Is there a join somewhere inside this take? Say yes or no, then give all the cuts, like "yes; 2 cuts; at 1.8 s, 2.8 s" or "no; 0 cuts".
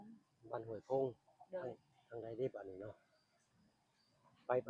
no; 0 cuts